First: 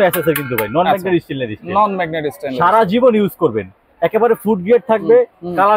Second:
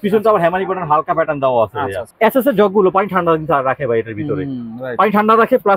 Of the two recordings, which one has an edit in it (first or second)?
second